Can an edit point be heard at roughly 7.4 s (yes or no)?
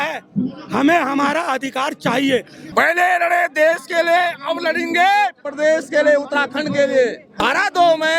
yes